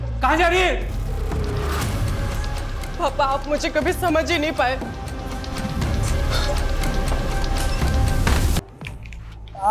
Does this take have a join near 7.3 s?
no; 1 cut; at 8.6 s

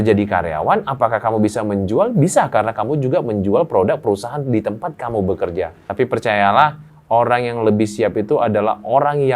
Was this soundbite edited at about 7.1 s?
no; 1 cut; at 5.8 s

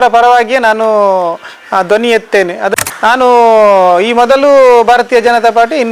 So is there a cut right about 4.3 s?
no; 1 cut; at 2.7 s

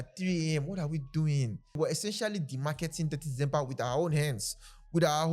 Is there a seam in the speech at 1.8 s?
yes; 1 cut; at 1.8 s

